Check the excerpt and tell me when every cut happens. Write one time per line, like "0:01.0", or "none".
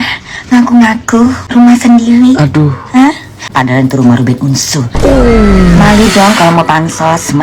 0:01.4
0:03.5